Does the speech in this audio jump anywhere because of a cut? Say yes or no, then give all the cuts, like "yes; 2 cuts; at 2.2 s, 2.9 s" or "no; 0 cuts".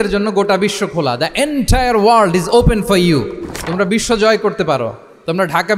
no; 0 cuts